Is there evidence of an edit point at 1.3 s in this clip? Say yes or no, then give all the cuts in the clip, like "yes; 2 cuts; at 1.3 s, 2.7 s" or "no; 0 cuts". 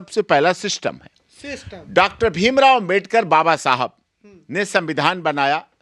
no; 0 cuts